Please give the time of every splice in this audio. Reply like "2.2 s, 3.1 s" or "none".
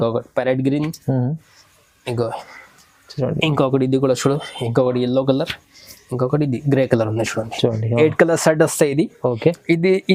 none